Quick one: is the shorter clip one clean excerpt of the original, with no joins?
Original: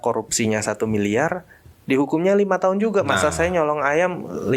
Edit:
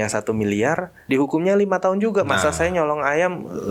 no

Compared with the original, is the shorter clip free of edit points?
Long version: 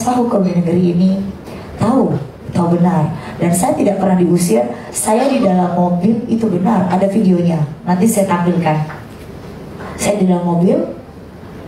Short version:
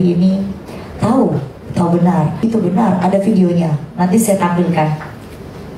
no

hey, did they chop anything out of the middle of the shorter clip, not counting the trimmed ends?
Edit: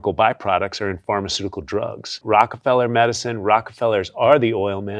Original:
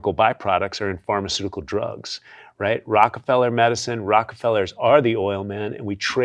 yes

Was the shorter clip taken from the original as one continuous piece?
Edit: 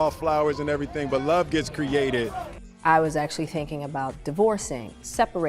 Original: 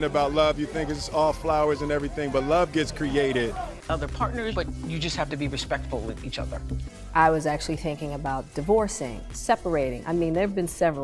no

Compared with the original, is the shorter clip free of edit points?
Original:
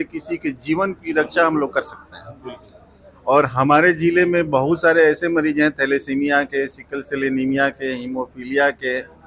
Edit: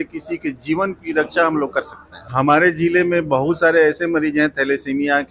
no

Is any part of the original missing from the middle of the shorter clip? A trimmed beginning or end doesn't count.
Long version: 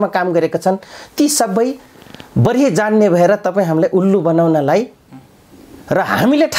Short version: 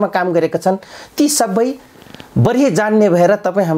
no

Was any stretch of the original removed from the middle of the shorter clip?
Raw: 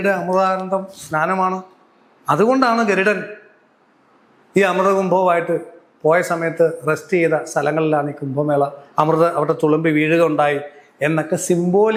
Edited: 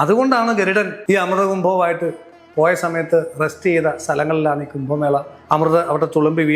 yes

